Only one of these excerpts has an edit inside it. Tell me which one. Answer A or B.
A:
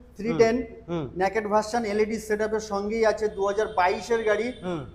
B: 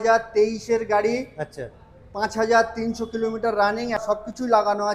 B